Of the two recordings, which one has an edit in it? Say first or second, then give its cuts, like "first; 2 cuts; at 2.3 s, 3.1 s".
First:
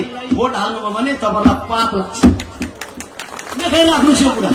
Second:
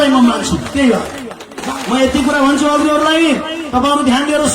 second; 1 cut; at 1.6 s